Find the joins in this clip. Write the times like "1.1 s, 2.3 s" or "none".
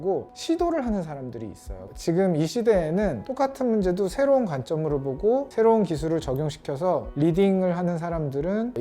1.8 s